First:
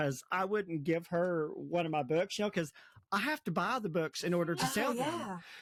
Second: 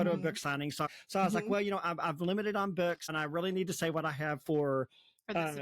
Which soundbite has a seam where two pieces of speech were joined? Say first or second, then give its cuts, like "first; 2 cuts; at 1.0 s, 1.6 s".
second; 2 cuts; at 0.9 s, 3.1 s